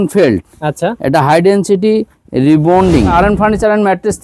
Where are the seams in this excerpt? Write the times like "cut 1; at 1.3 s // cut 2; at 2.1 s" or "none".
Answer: cut 1; at 3.1 s